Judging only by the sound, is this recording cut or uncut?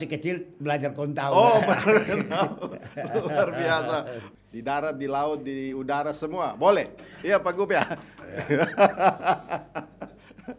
cut